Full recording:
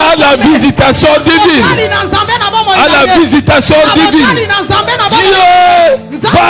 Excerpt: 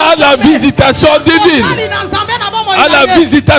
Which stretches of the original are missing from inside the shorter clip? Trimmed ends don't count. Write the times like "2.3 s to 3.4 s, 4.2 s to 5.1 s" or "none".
none